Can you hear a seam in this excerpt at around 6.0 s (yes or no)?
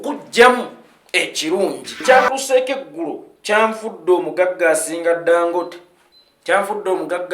no